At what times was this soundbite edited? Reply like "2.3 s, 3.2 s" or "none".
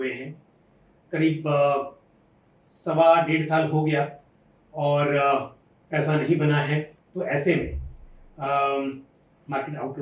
7.0 s